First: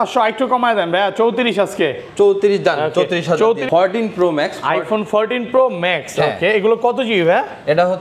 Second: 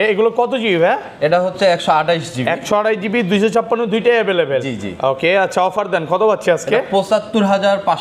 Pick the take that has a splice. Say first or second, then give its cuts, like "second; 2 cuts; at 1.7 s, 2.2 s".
first; 1 cut; at 3.7 s